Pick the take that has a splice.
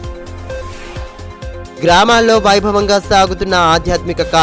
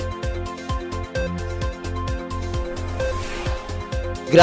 second; 1 cut; at 1.1 s

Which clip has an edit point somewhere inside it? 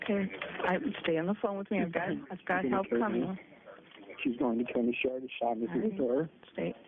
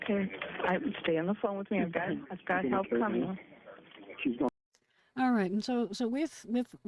first; 1 cut; at 4.5 s

